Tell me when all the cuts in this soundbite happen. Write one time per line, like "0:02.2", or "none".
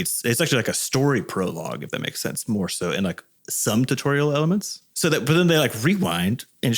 0:04.8